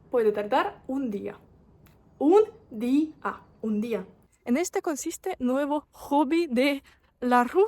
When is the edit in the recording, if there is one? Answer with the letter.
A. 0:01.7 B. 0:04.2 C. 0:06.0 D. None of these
B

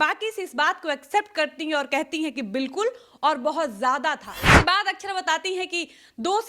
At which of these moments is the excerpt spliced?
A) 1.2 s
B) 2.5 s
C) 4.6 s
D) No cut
C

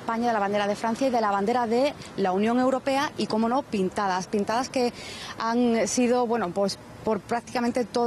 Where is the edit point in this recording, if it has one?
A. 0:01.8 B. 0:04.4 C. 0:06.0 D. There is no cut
C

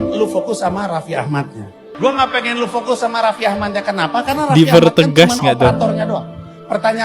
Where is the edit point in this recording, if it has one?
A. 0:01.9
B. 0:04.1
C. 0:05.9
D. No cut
A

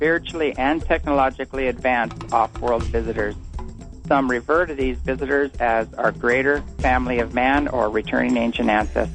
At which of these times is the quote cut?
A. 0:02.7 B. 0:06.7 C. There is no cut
B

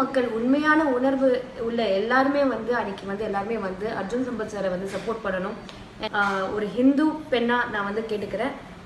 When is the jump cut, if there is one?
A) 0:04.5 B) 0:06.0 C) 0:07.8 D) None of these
B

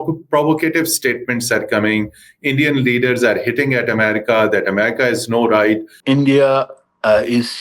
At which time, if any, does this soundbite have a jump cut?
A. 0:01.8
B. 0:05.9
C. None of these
B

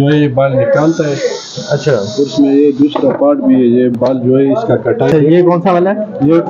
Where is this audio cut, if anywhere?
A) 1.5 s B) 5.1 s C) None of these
B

